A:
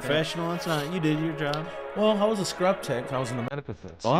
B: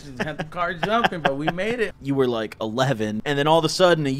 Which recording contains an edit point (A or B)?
B